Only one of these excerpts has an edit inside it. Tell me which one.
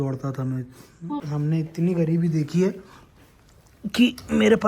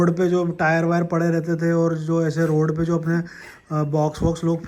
first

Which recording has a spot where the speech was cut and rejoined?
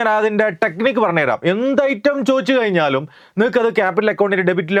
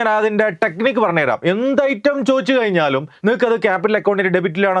second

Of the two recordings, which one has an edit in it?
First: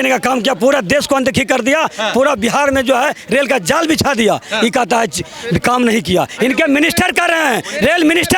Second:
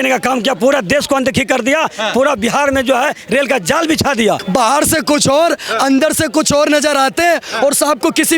second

